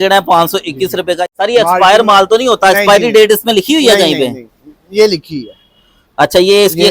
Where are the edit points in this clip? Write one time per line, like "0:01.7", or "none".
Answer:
0:01.2